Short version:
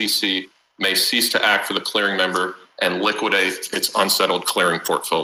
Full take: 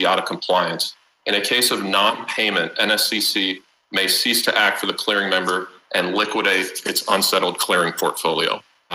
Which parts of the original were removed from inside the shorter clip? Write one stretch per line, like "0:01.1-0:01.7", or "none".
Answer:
none